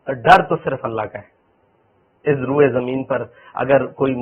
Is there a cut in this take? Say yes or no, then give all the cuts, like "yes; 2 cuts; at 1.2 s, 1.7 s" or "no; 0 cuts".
no; 0 cuts